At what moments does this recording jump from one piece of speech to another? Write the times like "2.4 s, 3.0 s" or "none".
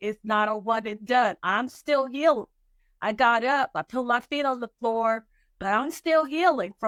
none